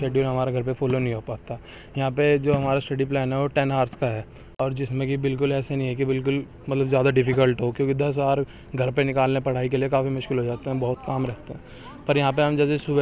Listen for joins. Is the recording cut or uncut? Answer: uncut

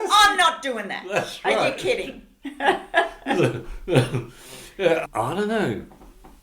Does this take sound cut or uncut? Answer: cut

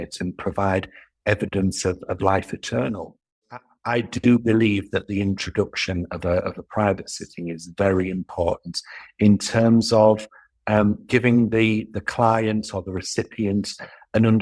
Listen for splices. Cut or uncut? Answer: cut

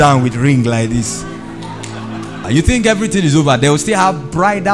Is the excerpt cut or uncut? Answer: cut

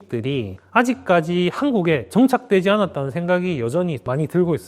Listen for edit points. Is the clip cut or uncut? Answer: uncut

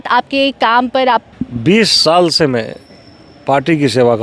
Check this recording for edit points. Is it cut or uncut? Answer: cut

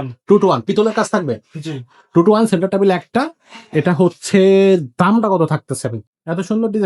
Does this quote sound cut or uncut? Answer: cut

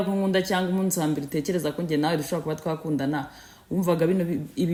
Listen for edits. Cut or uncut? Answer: uncut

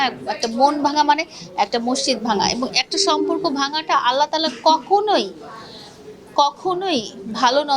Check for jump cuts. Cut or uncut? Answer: uncut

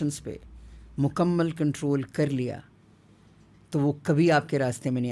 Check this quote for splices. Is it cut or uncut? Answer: uncut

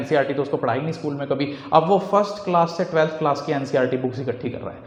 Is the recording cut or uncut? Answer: uncut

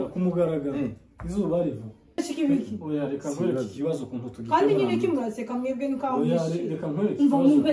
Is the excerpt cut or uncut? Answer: cut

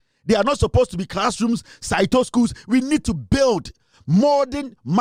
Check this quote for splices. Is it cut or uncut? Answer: uncut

